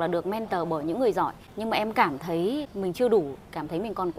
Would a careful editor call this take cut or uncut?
cut